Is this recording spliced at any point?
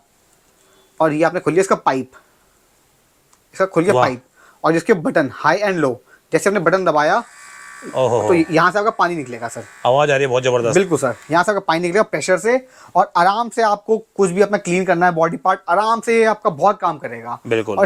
no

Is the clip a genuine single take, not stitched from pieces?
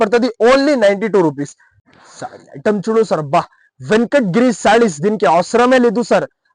no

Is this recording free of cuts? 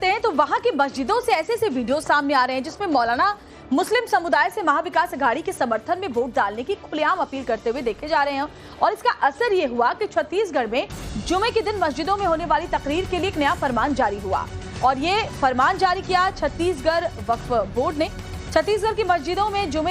no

